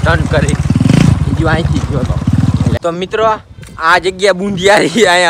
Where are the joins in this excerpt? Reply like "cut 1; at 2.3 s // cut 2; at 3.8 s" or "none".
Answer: cut 1; at 2.8 s